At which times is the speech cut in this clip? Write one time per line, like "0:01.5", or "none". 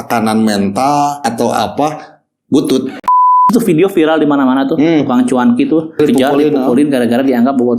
0:01.2
0:03.3
0:06.0